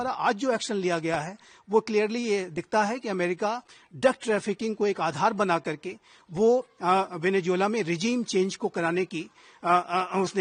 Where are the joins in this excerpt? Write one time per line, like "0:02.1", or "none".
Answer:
none